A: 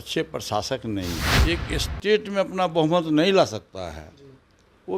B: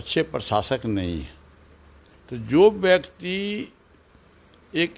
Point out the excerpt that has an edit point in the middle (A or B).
A